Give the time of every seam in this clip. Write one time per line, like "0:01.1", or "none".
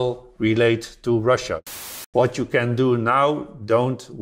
0:01.7